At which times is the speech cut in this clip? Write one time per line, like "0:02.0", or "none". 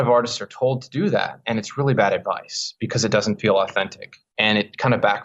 none